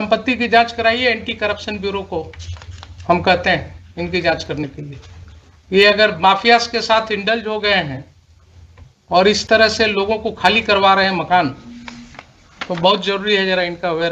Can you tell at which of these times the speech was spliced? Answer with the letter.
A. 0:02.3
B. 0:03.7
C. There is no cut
C